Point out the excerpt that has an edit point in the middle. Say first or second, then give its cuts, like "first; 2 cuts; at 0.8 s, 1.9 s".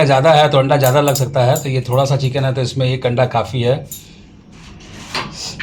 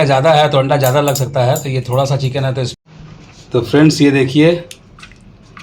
second; 1 cut; at 2.7 s